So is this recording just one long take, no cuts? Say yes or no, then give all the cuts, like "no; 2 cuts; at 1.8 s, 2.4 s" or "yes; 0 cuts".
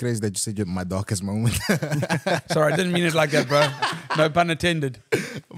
yes; 0 cuts